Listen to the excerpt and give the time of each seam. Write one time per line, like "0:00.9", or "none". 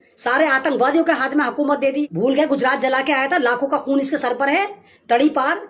0:02.1